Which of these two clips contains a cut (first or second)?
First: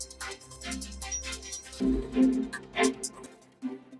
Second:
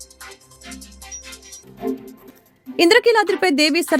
first